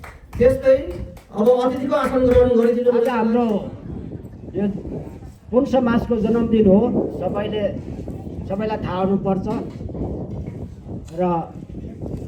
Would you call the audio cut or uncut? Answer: cut